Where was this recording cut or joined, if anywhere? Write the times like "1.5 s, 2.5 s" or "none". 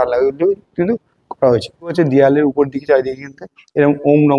1.9 s

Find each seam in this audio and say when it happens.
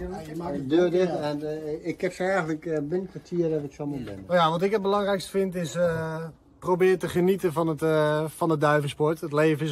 4.1 s

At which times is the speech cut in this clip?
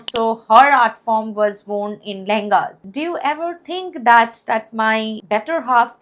2.8 s, 5.2 s

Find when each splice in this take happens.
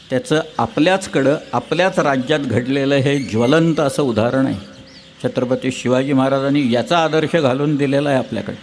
none

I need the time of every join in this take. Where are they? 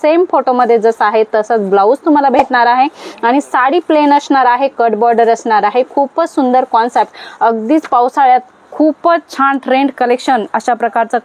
none

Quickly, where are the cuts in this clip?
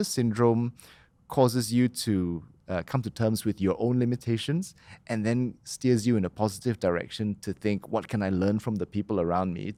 none

